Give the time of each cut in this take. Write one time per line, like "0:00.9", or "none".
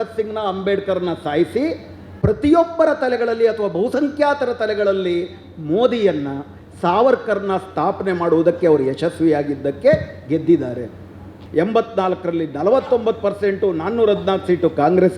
0:11.3